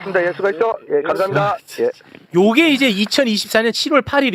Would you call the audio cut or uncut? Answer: uncut